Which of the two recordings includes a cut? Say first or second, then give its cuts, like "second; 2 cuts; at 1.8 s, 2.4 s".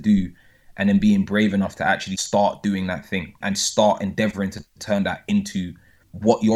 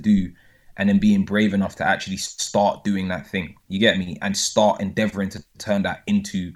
first; 2 cuts; at 2.1 s, 3.3 s